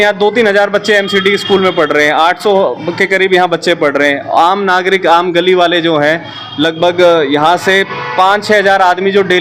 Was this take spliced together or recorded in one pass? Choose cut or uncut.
uncut